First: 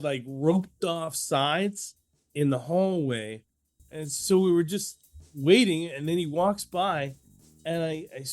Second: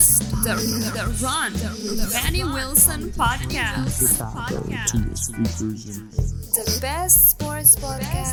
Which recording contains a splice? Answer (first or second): first